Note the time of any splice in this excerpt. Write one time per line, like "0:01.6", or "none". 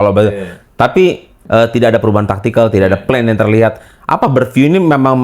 0:01.3